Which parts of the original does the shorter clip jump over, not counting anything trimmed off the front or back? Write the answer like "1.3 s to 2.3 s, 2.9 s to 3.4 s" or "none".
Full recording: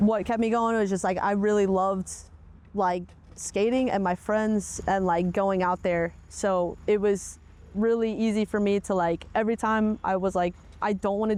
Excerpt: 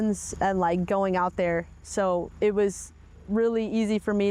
none